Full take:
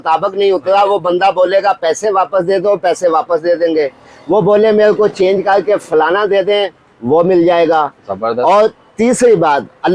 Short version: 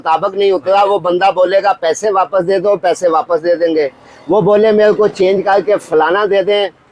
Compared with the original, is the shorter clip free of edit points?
yes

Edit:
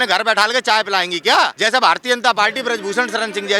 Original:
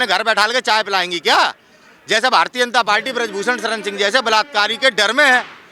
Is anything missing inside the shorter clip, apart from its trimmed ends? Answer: yes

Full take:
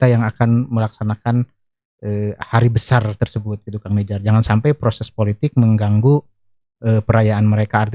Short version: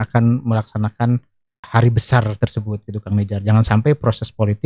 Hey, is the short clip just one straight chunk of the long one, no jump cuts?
no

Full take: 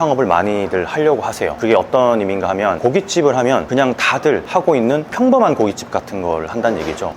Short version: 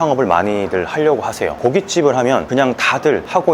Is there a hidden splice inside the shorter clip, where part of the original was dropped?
yes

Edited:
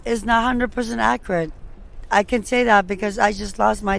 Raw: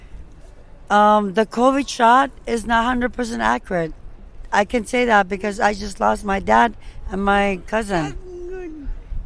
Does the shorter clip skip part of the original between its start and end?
no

